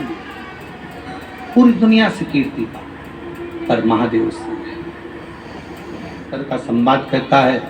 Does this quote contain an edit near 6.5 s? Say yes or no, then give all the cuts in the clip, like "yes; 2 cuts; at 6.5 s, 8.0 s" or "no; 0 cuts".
yes; 1 cut; at 6.5 s